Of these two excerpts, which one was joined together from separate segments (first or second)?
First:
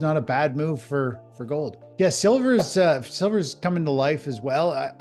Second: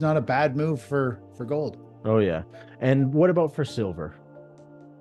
first